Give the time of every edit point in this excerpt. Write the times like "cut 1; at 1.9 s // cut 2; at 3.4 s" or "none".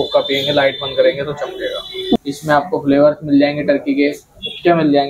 cut 1; at 2.2 s